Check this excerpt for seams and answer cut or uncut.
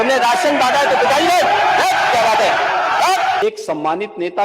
cut